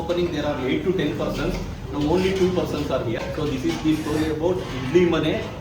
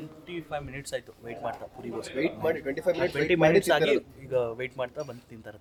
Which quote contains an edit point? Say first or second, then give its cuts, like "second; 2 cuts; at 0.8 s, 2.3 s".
first; 1 cut; at 3.2 s